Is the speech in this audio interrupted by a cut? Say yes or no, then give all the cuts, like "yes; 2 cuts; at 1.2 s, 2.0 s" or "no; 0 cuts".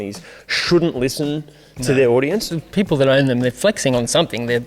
yes; 1 cut; at 2.5 s